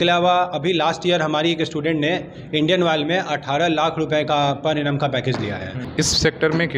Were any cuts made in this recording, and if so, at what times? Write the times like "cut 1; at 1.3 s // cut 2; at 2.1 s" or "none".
cut 1; at 5.8 s